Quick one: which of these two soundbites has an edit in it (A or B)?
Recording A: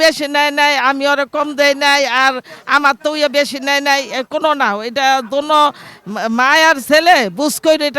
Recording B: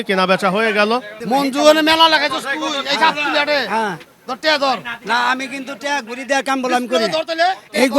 B